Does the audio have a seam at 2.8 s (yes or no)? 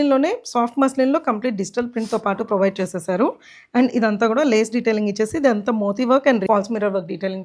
no